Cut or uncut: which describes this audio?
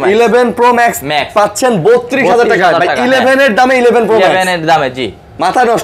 uncut